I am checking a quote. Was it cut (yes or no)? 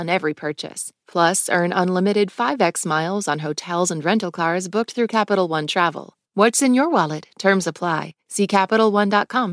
yes